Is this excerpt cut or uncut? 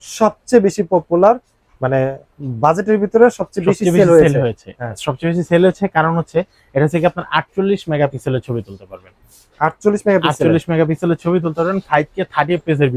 uncut